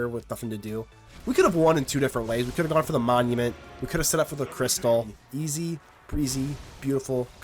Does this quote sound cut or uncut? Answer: cut